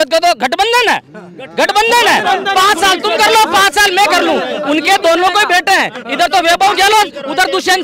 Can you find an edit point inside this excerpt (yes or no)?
no